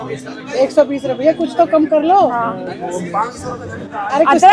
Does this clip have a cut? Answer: no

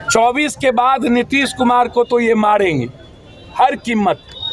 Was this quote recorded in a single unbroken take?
yes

